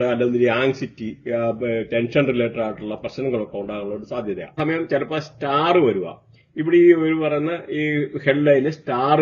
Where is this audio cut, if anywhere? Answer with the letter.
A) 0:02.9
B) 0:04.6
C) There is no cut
B